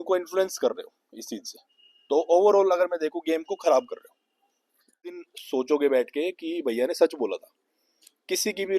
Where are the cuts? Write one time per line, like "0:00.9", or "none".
0:05.2